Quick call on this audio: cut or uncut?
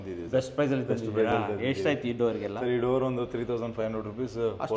uncut